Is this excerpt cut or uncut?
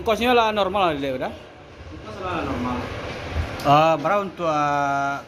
uncut